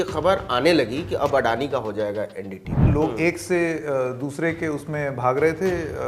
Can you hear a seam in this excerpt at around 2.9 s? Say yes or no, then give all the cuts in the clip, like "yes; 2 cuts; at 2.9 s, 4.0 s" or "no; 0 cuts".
yes; 1 cut; at 2.9 s